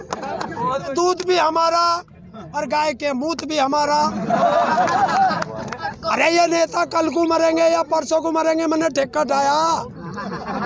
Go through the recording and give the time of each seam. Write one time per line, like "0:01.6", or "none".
0:00.9
0:05.9